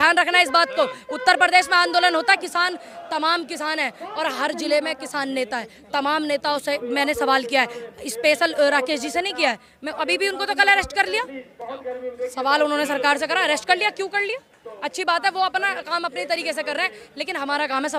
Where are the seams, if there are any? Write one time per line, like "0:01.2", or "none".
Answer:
none